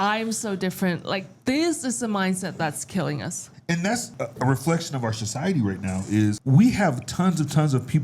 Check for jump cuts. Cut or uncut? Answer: cut